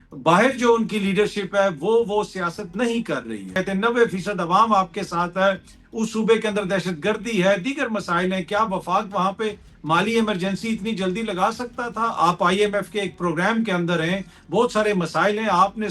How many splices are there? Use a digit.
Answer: 1